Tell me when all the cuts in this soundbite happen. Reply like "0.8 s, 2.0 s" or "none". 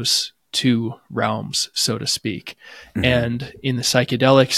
none